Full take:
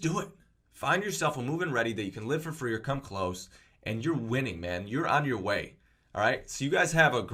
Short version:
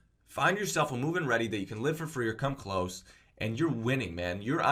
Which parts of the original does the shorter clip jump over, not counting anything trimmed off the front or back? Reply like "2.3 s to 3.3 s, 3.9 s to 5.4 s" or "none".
none